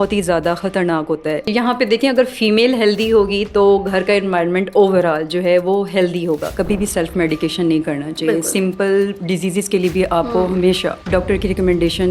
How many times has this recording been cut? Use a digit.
3